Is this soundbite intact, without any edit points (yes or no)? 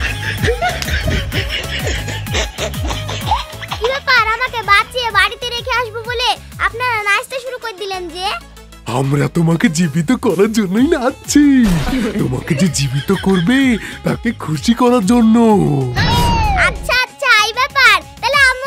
yes